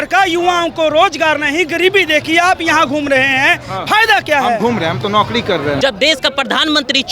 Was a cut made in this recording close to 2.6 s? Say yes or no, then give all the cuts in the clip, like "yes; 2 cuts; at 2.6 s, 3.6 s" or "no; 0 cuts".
no; 1 cut; at 5.8 s